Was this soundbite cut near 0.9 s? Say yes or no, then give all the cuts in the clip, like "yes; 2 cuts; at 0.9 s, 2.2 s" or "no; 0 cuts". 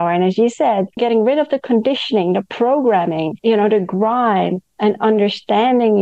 yes; 2 cuts; at 0.9 s, 3.3 s